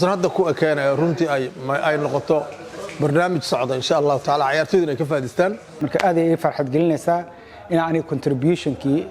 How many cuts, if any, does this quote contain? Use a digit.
1